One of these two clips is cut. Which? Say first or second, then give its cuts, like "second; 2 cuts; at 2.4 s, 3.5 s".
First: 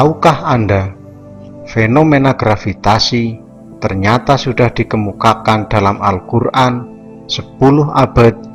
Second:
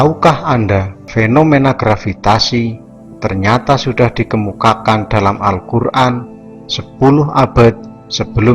second; 1 cut; at 1.0 s